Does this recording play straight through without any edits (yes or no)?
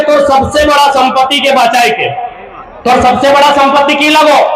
yes